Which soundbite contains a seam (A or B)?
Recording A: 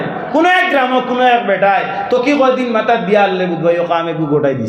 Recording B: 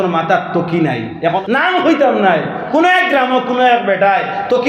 B